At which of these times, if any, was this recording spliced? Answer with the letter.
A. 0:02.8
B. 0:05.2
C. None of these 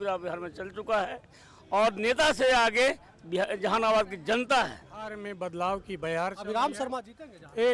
B